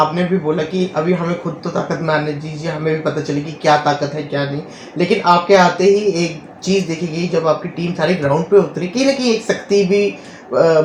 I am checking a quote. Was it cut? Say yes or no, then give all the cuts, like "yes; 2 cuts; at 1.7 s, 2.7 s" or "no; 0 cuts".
no; 0 cuts